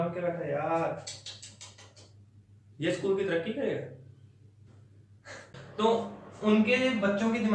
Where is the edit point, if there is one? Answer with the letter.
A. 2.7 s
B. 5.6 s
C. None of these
B